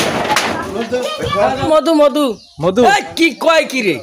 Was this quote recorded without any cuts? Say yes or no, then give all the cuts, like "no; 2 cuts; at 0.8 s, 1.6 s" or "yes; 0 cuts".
no; 1 cut; at 1.7 s